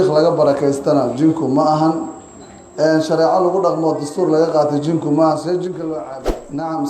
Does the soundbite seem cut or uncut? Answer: cut